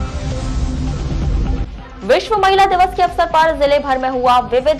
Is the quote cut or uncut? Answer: cut